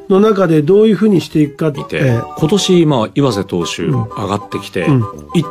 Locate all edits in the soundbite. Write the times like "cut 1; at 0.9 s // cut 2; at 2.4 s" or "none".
none